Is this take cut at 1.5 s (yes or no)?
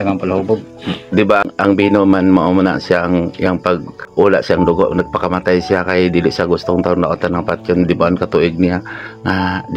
yes